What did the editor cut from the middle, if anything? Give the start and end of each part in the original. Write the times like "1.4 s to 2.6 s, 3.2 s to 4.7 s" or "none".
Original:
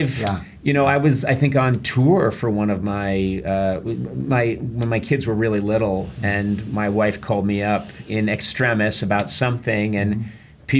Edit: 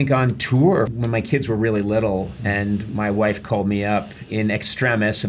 2.4 s to 4.7 s